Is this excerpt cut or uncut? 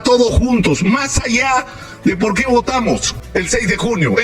cut